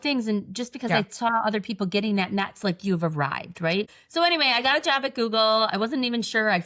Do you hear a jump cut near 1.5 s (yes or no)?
no